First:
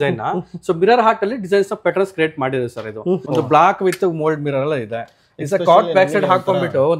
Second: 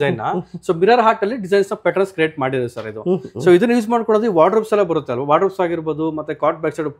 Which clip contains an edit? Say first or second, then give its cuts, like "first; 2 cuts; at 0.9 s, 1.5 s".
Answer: first; 1 cut; at 3.2 s